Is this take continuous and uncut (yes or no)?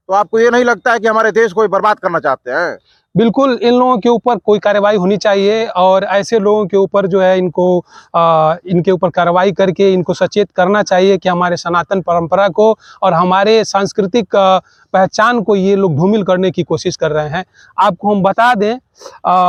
yes